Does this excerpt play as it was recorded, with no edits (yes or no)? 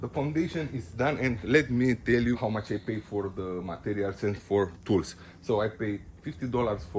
no